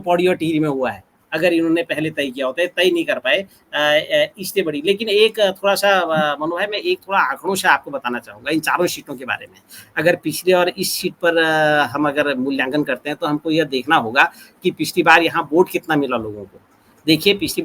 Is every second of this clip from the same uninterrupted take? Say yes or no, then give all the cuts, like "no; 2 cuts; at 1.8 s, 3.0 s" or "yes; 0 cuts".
yes; 0 cuts